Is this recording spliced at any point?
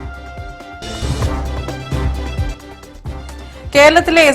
no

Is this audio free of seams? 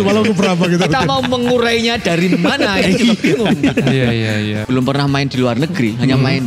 no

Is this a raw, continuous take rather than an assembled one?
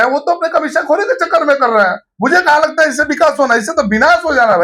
yes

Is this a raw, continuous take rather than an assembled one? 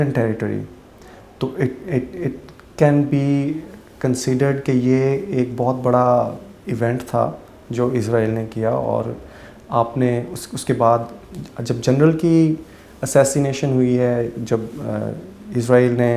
yes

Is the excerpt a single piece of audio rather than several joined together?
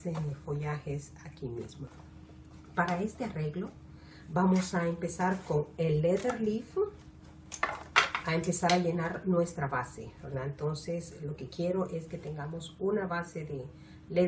no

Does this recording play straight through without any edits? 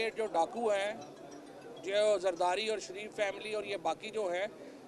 yes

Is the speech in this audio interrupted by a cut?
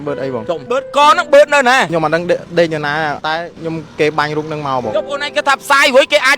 yes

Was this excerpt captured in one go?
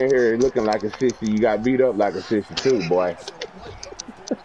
yes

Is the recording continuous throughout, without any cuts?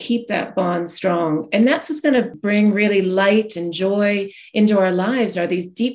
no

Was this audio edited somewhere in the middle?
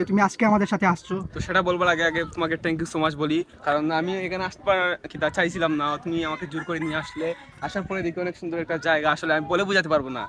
no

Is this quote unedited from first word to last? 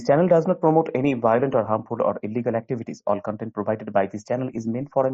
yes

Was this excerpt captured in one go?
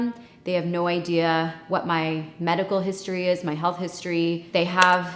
yes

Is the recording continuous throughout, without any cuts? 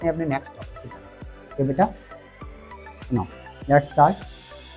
yes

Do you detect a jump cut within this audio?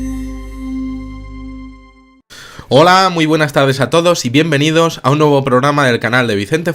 no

